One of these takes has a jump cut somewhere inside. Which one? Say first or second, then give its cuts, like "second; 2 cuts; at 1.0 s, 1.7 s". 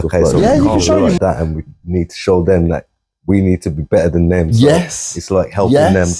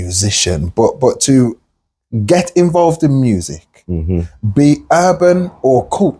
first; 1 cut; at 1.2 s